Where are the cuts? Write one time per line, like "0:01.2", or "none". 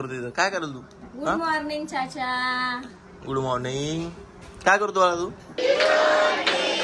0:05.6